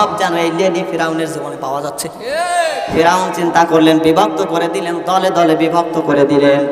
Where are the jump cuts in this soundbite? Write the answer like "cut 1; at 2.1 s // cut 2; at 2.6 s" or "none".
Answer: cut 1; at 3.0 s

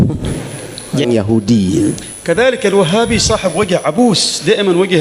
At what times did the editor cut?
cut 1; at 1.0 s

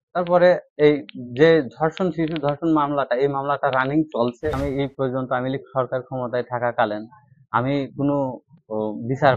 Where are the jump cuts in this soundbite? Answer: cut 1; at 4.6 s

